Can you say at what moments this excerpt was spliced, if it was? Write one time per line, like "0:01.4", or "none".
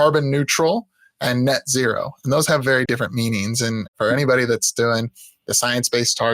0:02.9
0:03.9